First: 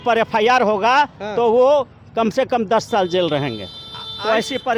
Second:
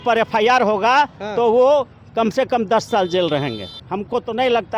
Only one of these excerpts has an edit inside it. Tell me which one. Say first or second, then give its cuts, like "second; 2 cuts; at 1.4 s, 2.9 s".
second; 1 cut; at 3.8 s